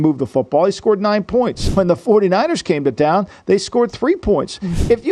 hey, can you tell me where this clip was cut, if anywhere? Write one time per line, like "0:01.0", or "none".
0:01.6